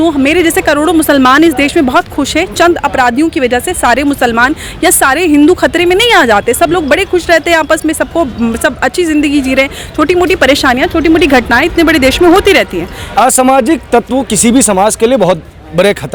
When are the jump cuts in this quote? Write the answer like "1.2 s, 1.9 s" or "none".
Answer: none